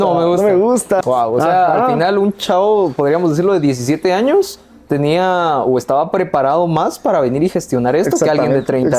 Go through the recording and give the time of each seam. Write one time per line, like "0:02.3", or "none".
0:01.0